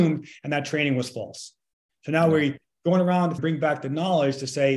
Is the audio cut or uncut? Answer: cut